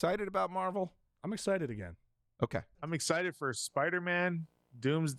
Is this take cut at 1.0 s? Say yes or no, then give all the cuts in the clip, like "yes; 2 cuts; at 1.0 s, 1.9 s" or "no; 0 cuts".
no; 1 cut; at 2.8 s